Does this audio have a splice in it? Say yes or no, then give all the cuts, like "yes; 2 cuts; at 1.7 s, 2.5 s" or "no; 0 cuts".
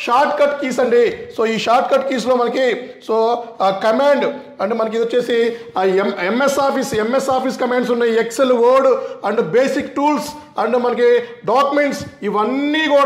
no; 0 cuts